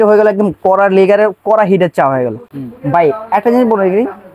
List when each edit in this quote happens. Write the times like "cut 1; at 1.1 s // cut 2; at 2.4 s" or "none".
none